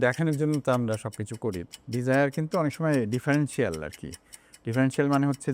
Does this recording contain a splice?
yes; 1 cut; at 1.7 s

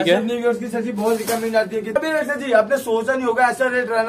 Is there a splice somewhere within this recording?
yes; 1 cut; at 1.9 s

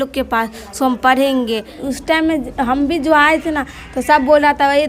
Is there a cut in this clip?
yes; 1 cut; at 1.8 s

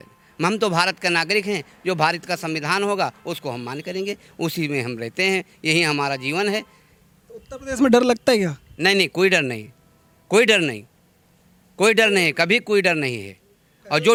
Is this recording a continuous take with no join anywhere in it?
yes; 0 cuts

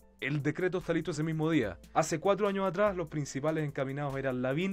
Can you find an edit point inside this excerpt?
yes; 1 cut; at 1.8 s

